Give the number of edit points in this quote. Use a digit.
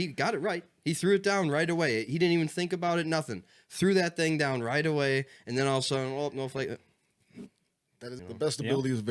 1